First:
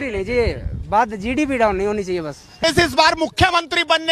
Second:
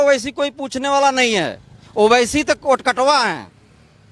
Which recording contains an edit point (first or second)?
first